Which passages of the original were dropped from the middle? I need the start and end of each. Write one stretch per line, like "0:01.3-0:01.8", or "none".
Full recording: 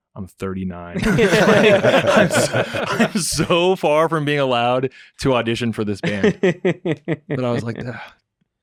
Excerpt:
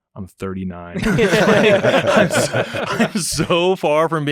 none